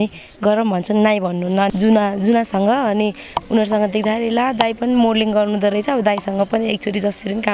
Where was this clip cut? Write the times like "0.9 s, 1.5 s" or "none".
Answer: 1.7 s